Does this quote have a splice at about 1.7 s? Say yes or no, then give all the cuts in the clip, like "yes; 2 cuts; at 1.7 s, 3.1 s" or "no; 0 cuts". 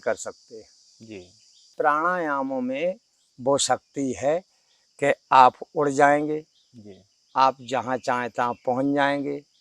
yes; 1 cut; at 1.7 s